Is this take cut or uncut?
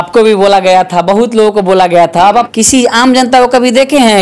cut